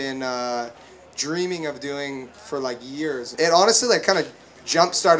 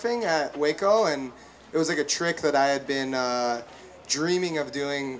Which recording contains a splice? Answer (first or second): first